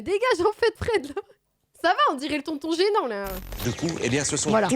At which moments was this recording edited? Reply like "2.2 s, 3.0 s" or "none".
1.7 s, 3.5 s